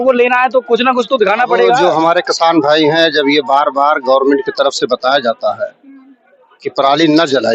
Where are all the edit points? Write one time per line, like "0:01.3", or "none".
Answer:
0:01.8